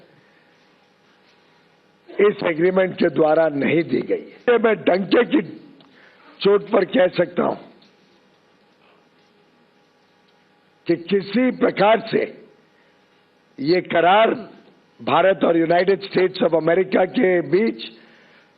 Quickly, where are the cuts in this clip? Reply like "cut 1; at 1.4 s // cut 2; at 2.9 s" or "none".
cut 1; at 4.5 s